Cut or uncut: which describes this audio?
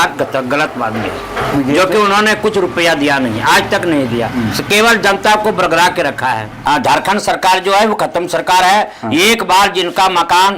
cut